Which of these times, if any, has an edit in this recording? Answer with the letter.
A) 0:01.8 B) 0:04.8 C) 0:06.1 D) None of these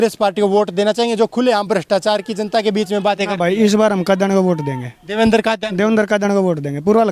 D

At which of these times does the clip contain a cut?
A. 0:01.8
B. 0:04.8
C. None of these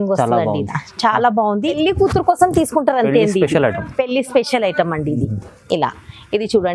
A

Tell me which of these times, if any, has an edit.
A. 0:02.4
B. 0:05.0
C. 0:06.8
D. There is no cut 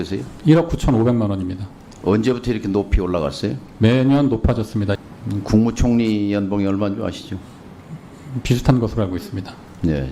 B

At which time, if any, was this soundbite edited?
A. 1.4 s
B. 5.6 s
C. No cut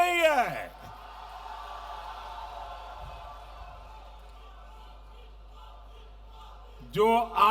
C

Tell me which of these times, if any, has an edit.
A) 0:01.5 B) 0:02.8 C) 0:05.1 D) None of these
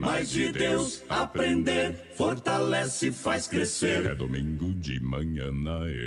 D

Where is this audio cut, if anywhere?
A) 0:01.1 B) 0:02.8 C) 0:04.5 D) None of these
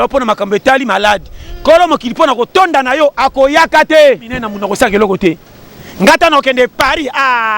C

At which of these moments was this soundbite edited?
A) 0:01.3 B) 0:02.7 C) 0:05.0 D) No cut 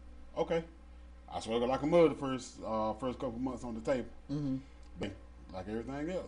C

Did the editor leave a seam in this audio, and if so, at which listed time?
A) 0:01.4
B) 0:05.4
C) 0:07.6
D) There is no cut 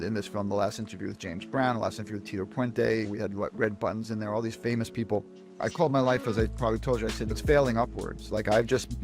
B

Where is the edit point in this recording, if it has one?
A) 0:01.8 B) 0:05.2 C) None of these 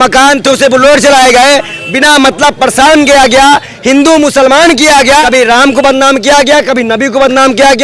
B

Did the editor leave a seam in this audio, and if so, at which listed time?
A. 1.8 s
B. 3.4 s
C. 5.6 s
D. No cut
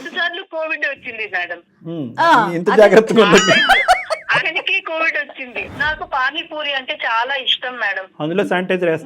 C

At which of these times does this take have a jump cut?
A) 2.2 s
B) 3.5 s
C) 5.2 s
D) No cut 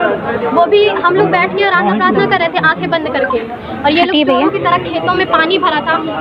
D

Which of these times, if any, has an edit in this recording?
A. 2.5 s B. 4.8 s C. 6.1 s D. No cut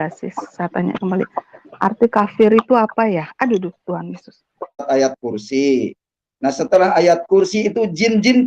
B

